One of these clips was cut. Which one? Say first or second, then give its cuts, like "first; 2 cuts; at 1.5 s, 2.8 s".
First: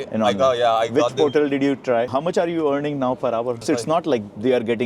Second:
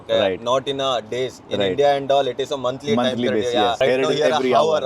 first; 2 cuts; at 2.1 s, 3.6 s